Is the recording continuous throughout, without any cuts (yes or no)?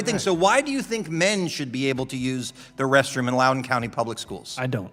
yes